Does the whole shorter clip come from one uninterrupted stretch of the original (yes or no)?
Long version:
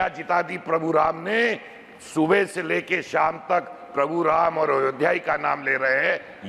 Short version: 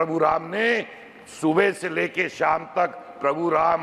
yes